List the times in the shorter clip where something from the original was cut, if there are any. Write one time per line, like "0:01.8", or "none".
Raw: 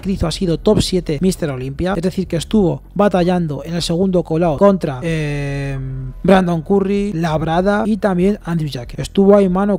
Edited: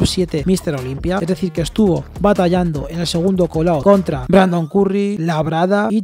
0:04.2

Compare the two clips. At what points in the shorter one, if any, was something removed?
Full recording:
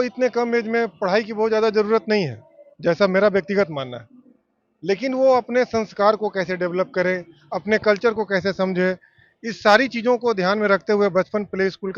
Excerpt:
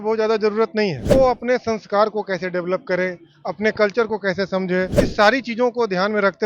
0:01.1
0:05.0

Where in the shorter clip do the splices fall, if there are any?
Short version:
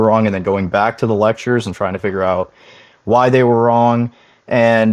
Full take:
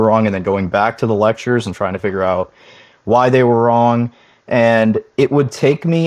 none

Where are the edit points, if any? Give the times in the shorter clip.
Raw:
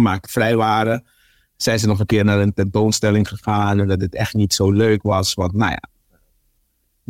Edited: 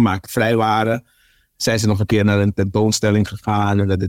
none

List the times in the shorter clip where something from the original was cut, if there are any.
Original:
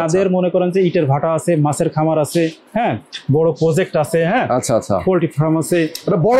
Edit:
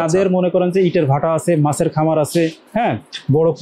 none

